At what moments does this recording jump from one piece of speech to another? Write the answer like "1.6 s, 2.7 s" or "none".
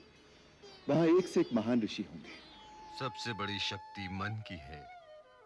2.8 s